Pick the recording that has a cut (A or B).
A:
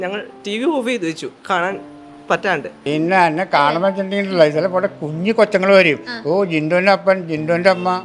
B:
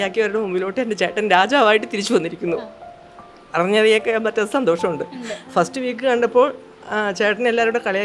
A